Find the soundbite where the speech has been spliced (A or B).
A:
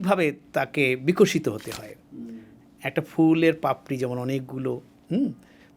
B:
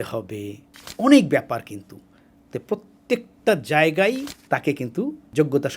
B